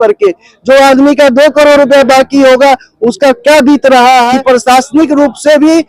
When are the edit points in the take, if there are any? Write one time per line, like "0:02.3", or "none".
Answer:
0:04.3